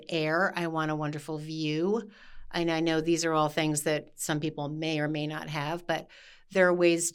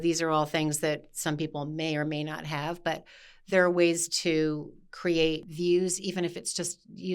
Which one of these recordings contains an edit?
second; 1 cut; at 5.5 s

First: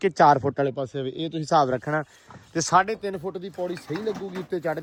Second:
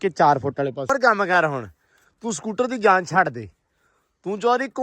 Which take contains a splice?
second; 1 cut; at 0.9 s

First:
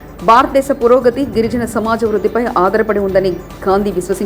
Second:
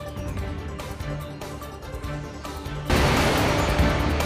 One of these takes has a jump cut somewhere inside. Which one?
second; 2 cuts; at 0.8 s, 2.2 s

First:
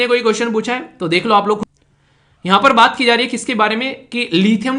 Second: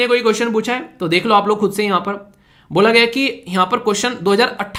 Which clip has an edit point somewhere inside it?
first; 1 cut; at 1.6 s

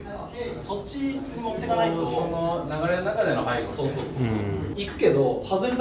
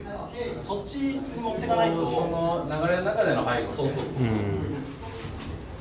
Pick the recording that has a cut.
first; 1 cut; at 4.8 s

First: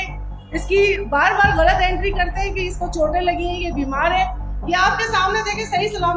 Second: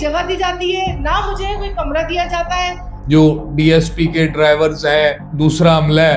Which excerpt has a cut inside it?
second; 2 cuts; at 2.8 s, 5.3 s

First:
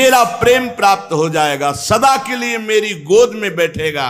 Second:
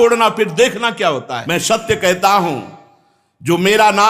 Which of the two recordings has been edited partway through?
second; 1 cut; at 1.4 s

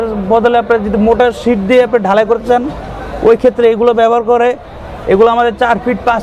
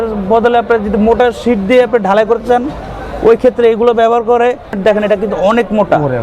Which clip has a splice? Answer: second; 1 cut; at 4.7 s

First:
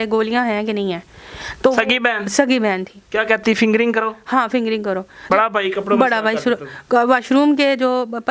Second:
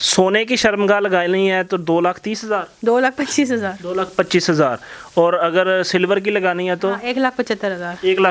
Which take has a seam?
first; 1 cut; at 5.3 s

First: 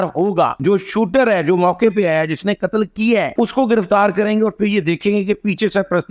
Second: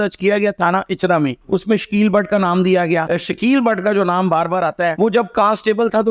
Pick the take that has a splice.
second; 2 cuts; at 1.4 s, 3.1 s

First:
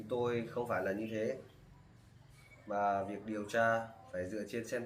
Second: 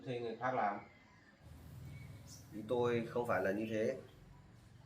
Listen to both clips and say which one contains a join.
second; 1 cut; at 1.4 s

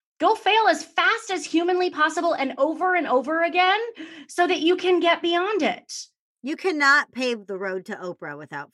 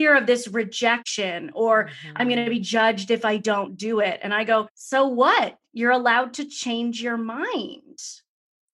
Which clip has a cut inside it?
second; 2 cuts; at 1.1 s, 4.8 s

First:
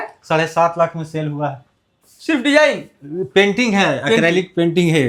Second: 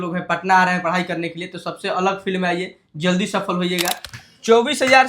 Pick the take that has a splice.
second; 1 cut; at 4.1 s

